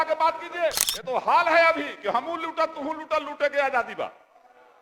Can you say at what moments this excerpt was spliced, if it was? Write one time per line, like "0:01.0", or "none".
0:00.9